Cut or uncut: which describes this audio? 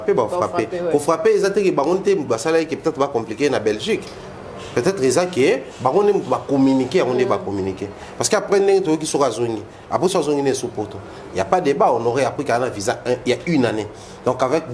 uncut